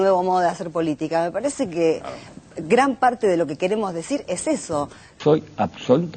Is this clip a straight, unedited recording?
no; 1 cut; at 5.2 s

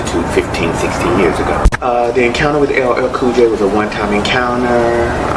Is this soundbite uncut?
yes; 0 cuts

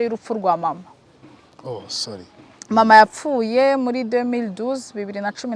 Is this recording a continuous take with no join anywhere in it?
yes; 0 cuts

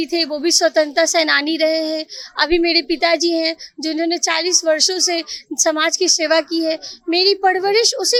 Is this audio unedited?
yes; 0 cuts

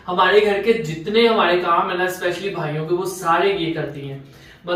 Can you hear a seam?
no; 0 cuts

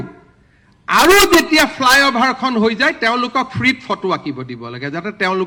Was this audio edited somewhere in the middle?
no; 0 cuts

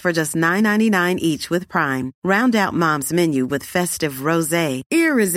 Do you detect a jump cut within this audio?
no; 0 cuts

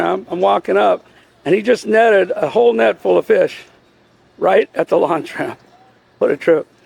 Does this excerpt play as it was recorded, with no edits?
yes; 0 cuts

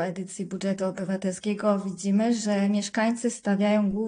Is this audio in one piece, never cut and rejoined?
yes; 0 cuts

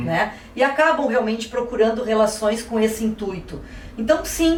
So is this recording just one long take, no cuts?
yes; 0 cuts

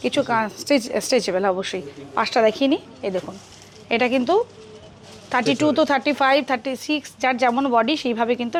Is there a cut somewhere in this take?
no; 0 cuts

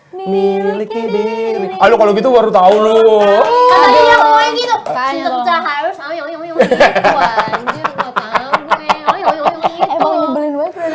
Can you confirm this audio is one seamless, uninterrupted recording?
yes; 0 cuts

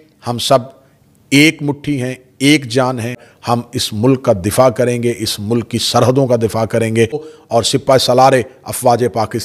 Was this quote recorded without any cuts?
no; 2 cuts; at 3.3 s, 7.3 s

